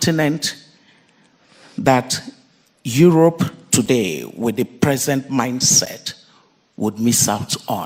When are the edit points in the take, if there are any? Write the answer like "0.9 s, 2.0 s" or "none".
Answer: none